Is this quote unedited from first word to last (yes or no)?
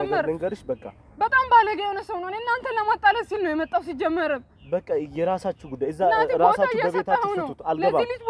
yes